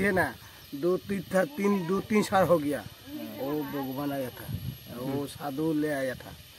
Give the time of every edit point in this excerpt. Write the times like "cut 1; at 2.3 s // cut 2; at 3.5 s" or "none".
none